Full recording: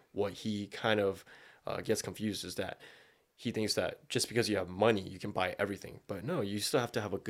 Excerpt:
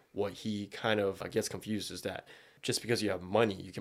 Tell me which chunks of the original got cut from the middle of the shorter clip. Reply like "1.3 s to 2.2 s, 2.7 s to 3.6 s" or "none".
1.3 s to 1.8 s, 3.1 s to 4.0 s